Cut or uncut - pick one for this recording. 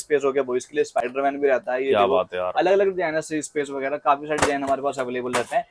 uncut